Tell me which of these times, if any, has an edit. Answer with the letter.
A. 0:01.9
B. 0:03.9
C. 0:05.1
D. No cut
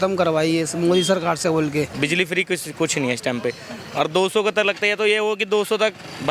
A